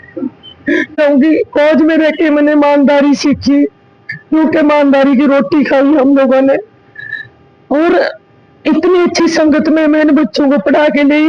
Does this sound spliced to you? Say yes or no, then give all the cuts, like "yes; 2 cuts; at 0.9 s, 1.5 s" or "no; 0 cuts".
yes; 1 cut; at 1.0 s